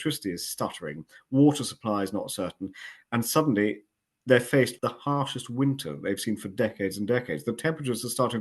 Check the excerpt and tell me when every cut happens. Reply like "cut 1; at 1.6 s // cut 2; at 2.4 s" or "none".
cut 1; at 4.7 s